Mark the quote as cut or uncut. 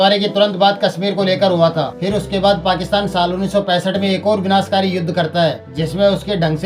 uncut